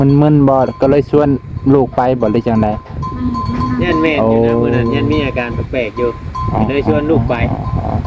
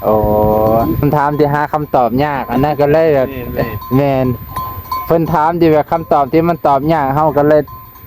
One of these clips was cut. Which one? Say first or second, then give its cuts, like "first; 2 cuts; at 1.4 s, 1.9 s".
second; 1 cut; at 1.0 s